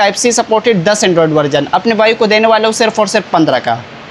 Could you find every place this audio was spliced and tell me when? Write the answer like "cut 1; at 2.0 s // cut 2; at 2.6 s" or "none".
none